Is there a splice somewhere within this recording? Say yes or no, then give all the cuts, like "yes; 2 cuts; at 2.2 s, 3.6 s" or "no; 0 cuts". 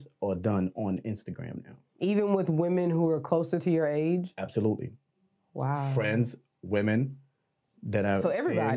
no; 0 cuts